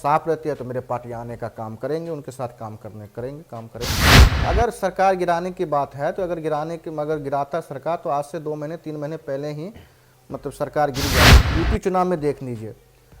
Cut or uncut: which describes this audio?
cut